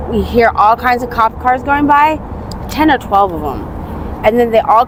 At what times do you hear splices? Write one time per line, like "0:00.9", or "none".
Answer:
none